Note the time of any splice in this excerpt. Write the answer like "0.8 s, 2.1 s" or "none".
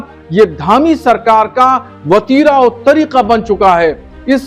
none